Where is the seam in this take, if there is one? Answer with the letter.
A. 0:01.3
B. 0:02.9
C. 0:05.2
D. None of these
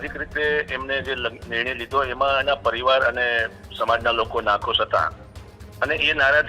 D